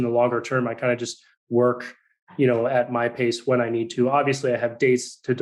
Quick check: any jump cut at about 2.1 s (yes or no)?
no